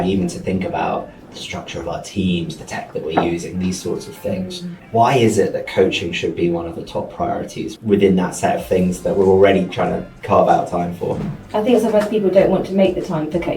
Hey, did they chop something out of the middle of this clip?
yes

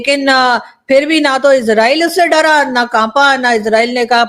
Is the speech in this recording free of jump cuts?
yes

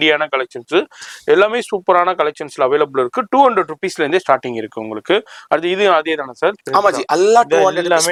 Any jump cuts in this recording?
no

